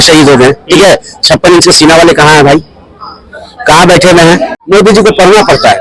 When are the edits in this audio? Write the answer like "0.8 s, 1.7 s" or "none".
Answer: 4.6 s